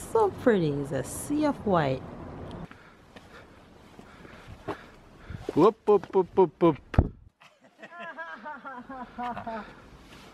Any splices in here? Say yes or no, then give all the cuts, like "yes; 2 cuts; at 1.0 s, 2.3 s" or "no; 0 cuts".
yes; 1 cut; at 2.6 s